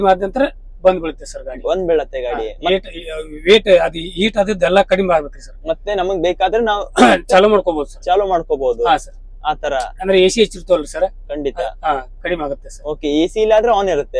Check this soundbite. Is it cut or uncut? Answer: uncut